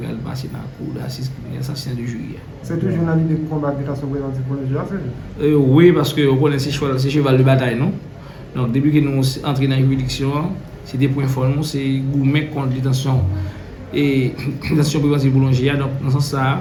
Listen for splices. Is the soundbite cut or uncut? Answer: uncut